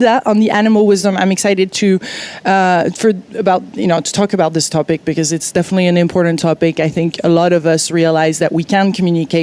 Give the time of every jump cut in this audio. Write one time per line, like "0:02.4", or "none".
0:05.7

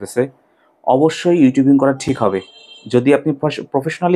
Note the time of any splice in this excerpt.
none

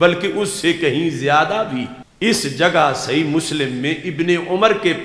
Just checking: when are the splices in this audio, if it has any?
0:02.0

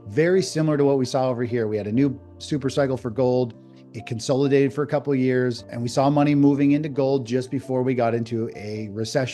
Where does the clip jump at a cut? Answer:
0:05.8

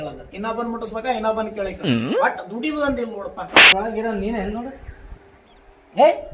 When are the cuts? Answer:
0:03.7

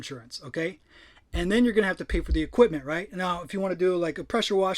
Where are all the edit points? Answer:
none

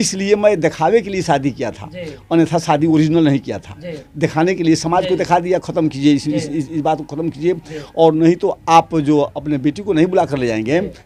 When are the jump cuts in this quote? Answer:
none

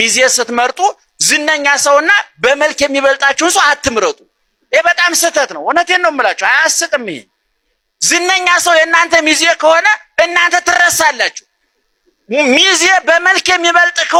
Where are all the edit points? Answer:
none

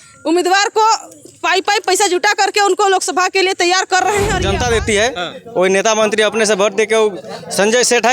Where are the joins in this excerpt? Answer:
0:04.4

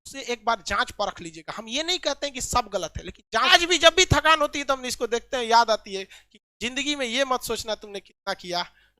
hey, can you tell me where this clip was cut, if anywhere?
0:03.5

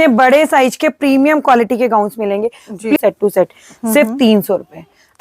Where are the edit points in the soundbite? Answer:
0:03.0

